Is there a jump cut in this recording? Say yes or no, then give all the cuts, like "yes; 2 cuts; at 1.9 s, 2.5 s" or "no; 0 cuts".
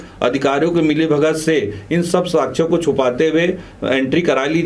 no; 0 cuts